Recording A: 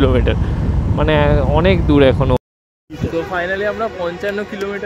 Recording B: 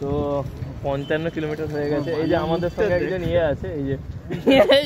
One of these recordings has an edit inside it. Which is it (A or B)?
A